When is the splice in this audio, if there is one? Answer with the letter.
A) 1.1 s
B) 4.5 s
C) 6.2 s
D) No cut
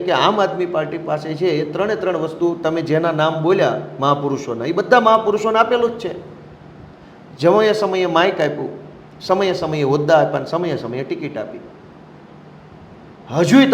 D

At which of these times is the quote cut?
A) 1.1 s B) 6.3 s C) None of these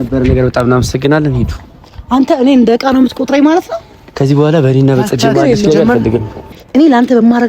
B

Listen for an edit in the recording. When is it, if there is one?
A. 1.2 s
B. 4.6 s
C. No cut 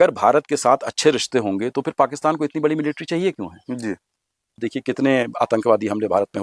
B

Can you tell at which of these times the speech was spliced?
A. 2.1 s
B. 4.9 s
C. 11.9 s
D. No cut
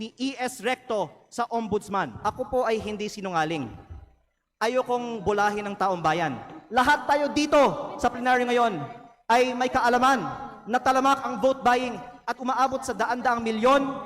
A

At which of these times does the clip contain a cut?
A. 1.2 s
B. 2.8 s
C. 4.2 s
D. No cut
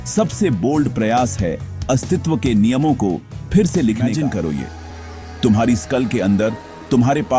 C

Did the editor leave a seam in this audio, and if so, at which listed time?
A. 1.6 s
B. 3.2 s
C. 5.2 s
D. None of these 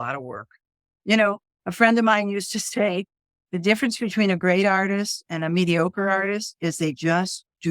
C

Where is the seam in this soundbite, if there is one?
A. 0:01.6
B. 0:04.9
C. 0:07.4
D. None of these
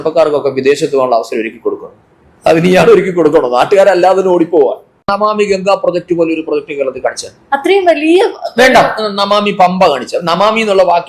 B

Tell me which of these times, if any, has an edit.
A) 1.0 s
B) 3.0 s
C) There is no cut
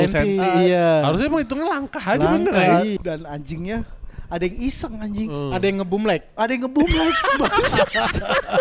B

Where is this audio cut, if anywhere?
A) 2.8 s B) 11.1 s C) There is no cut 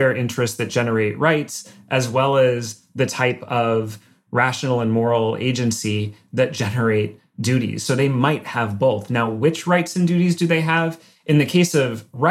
C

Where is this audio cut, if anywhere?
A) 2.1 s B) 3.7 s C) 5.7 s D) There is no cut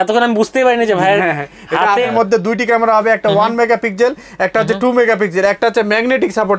A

